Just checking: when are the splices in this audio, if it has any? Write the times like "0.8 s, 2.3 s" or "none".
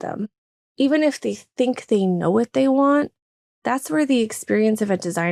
none